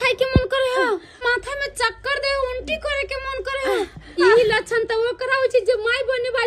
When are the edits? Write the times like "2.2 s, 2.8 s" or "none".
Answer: 1.2 s, 4.2 s